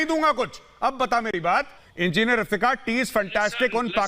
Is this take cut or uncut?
cut